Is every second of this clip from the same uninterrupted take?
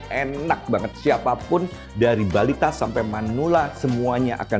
no; 1 cut; at 0.9 s

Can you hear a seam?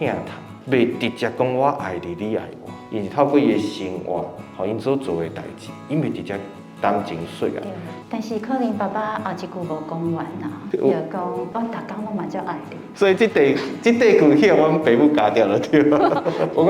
yes; 1 cut; at 7.9 s

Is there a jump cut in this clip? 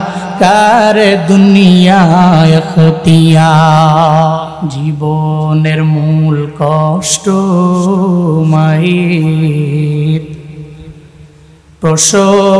yes; 1 cut; at 4.6 s

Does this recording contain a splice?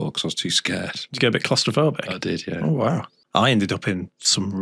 yes; 1 cut; at 3.2 s

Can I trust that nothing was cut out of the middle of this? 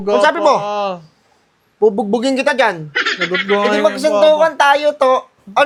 yes; 0 cuts

